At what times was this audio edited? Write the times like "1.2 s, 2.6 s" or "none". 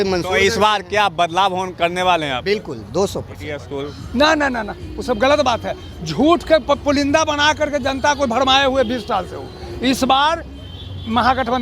3.7 s